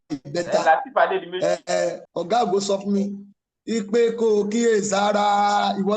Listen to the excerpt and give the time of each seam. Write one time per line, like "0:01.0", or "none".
0:02.0